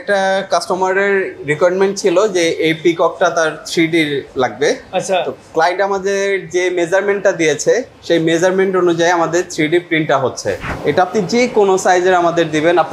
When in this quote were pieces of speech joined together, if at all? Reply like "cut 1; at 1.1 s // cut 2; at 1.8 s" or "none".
cut 1; at 10.7 s